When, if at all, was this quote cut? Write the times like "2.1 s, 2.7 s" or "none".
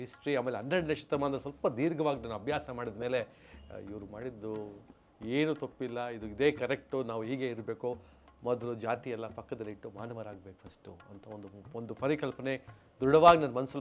none